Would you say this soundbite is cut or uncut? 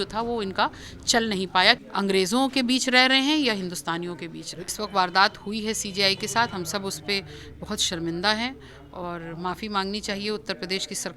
cut